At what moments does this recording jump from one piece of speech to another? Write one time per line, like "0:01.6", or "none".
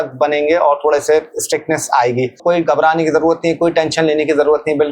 0:02.4